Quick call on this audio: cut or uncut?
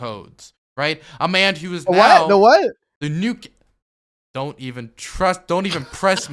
uncut